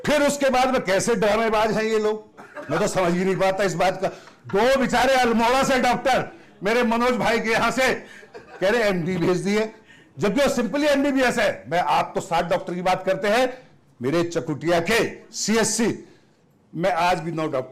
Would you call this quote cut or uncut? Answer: uncut